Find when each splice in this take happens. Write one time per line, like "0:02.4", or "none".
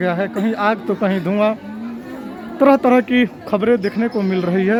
none